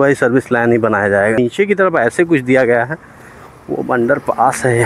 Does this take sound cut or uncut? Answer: cut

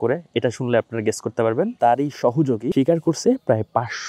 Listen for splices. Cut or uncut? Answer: cut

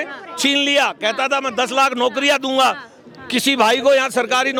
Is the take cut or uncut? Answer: uncut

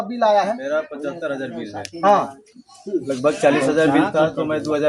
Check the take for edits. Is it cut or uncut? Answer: uncut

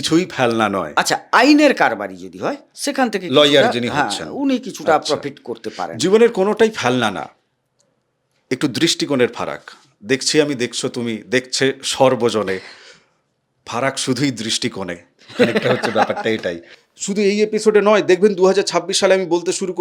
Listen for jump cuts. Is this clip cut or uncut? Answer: cut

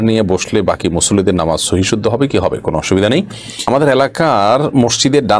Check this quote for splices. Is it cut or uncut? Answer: cut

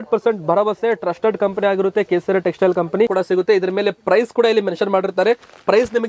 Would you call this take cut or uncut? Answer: cut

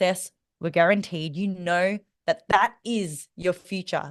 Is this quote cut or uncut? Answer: uncut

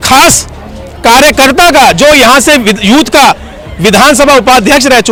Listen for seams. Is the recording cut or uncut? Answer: uncut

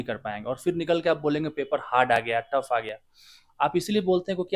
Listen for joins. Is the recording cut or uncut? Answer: uncut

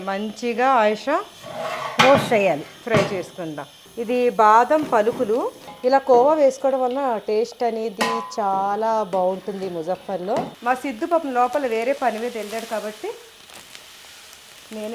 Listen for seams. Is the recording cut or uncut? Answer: cut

